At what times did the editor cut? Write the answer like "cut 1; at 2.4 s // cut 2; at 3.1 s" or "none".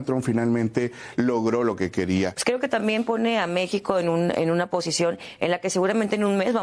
cut 1; at 2.4 s